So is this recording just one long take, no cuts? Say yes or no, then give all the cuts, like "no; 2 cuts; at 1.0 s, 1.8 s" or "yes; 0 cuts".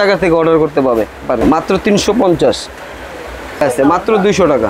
no; 2 cuts; at 1.4 s, 3.6 s